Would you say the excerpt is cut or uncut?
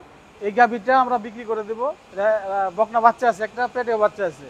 cut